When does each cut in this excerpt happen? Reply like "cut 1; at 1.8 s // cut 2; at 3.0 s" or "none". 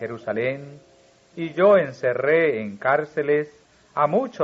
cut 1; at 1.3 s